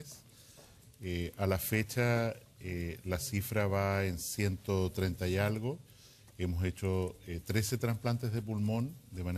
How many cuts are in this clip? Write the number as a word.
one